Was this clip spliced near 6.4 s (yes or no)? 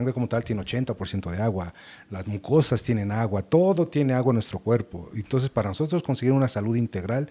no